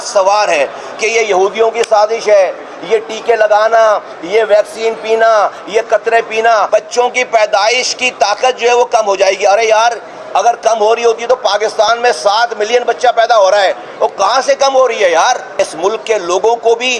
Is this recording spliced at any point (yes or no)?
yes